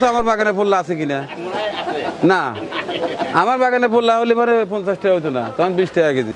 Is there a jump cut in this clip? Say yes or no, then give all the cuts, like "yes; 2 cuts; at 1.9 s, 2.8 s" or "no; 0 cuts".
no; 0 cuts